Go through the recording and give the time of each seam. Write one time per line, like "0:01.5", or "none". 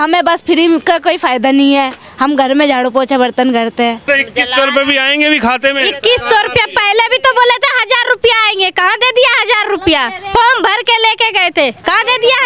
0:04.0